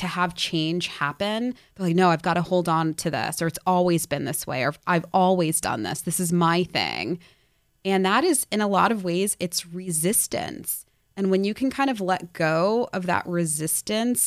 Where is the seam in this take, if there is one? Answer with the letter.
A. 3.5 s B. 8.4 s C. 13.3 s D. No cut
D